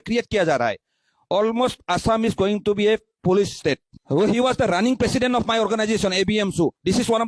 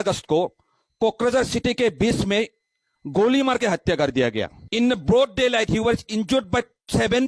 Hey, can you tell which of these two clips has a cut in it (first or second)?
first